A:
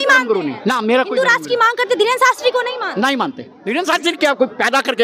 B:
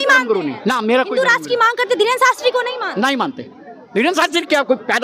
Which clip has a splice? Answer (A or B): A